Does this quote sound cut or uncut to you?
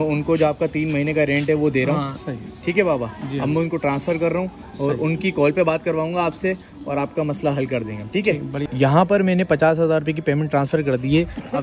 cut